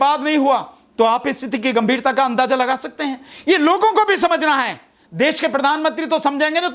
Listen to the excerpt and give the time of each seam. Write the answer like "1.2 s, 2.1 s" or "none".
none